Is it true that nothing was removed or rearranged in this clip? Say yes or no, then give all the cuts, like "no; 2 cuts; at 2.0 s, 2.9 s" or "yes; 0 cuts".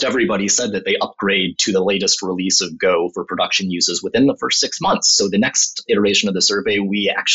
yes; 0 cuts